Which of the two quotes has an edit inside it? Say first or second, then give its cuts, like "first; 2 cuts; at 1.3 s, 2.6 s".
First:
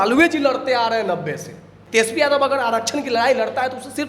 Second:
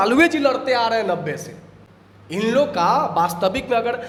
first; 1 cut; at 1.7 s